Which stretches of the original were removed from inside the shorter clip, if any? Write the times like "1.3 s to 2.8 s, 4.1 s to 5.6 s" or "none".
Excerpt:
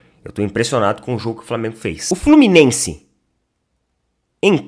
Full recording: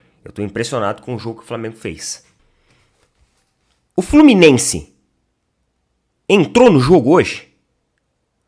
2.0 s to 3.9 s